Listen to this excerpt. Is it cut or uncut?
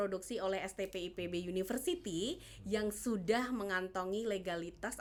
uncut